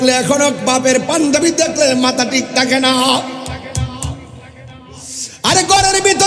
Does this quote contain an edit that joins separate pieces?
no; 0 cuts

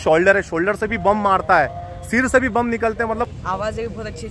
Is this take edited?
yes; 1 cut; at 3.3 s

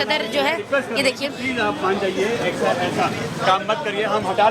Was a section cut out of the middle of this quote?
no; 0 cuts

